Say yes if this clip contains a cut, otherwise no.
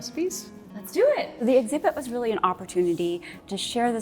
yes